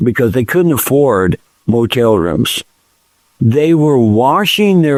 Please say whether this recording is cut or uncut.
uncut